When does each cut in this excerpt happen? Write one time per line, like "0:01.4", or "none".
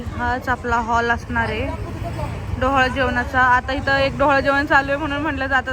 none